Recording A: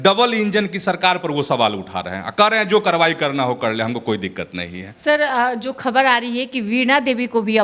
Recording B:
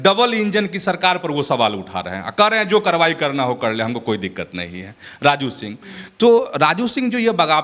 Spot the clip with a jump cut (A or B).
A